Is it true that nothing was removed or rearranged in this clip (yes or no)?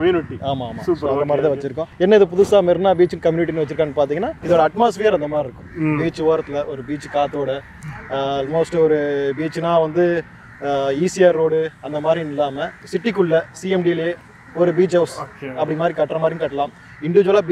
yes